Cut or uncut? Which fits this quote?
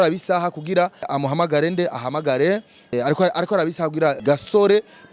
cut